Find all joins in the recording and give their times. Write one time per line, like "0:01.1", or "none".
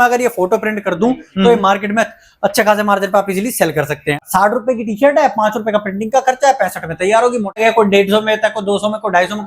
0:04.2
0:07.6